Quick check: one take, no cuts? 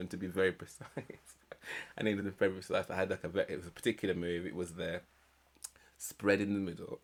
yes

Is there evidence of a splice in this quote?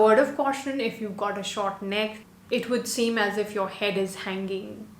yes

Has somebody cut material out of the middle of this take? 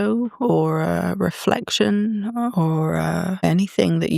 no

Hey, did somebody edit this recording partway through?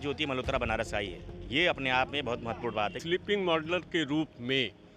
yes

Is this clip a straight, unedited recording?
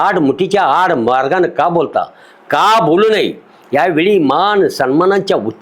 yes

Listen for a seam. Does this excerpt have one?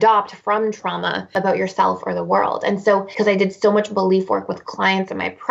yes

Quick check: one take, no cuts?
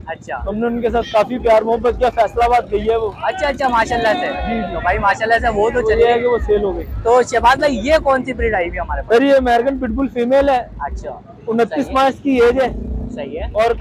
yes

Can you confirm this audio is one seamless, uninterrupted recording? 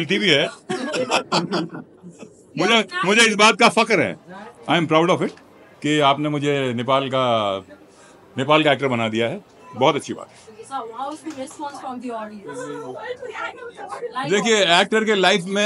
yes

